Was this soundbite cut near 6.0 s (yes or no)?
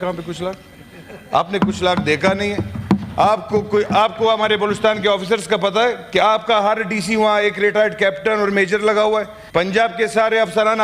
no